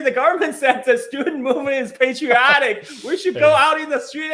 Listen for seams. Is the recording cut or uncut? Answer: uncut